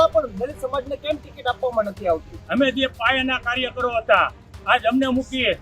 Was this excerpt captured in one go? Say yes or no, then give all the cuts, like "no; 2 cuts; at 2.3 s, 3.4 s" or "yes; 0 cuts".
no; 1 cut; at 2.4 s